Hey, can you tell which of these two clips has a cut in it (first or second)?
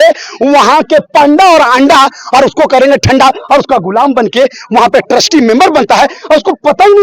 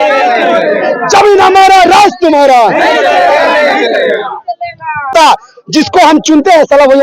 second